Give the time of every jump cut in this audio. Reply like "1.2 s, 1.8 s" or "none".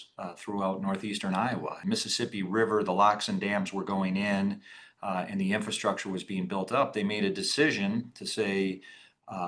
1.8 s